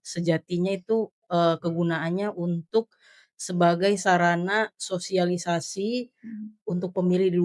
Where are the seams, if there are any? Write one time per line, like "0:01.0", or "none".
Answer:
none